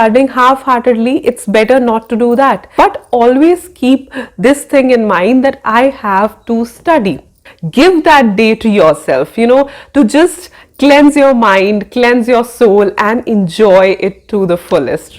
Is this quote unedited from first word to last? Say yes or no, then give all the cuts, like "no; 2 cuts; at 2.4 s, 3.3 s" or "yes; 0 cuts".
no; 2 cuts; at 2.7 s, 7.4 s